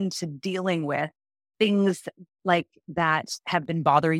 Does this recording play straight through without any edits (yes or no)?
yes